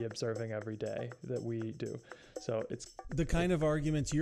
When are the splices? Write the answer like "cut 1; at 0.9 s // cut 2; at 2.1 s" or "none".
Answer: cut 1; at 3.0 s